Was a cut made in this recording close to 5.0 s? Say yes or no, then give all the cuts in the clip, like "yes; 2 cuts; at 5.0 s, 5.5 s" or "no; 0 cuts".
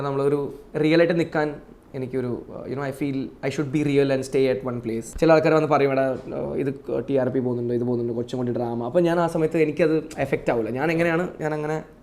yes; 1 cut; at 5.0 s